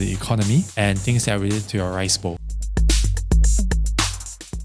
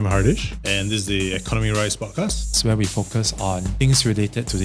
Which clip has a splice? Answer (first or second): first